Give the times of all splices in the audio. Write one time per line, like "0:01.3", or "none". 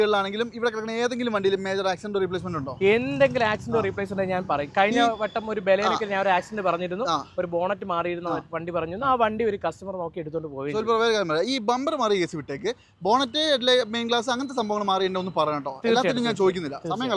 none

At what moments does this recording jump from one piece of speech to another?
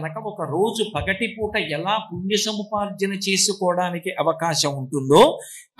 none

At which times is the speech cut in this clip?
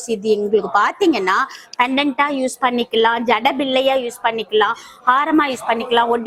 none

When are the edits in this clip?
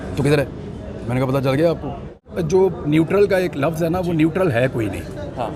0:02.2

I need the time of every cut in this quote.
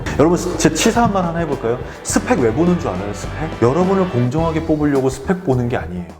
none

